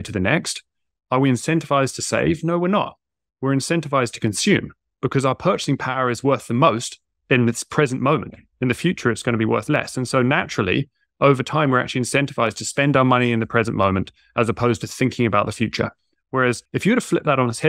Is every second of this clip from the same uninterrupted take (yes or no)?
no